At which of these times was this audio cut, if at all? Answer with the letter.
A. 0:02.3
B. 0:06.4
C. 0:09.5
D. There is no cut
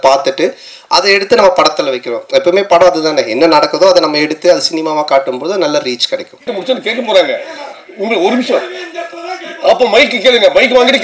B